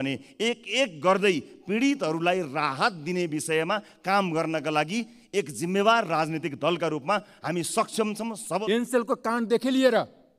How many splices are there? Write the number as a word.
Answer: one